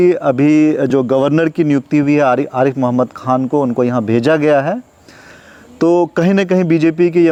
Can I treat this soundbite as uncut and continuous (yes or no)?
yes